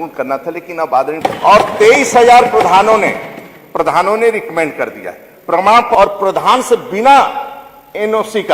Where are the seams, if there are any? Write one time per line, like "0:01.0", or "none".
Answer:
0:01.2
0:05.9